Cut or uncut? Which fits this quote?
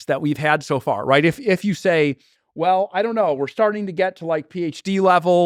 uncut